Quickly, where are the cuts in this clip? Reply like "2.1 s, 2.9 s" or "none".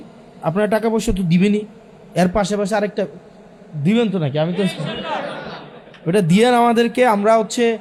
none